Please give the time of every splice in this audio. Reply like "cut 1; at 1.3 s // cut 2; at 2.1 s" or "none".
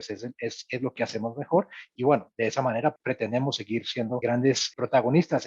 cut 1; at 1.9 s // cut 2; at 3.0 s // cut 3; at 4.5 s